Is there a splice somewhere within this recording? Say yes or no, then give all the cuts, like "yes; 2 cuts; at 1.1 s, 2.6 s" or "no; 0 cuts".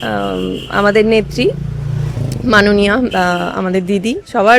no; 0 cuts